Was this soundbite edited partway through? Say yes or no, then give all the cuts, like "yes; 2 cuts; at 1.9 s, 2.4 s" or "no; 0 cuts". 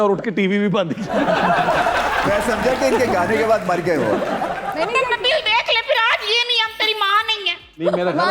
yes; 1 cut; at 4.7 s